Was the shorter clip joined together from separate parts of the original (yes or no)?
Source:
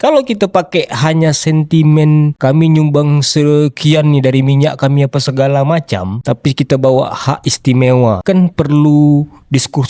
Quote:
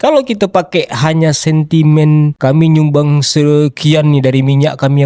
no